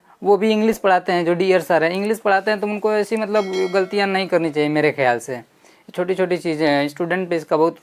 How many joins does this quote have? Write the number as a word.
zero